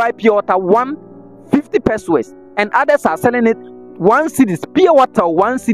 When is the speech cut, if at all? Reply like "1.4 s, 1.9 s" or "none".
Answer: none